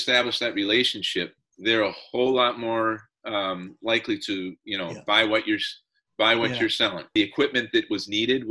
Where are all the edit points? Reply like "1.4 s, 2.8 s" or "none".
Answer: 7.0 s